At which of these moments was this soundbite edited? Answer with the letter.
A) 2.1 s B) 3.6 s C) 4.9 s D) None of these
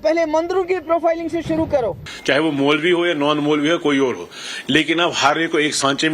A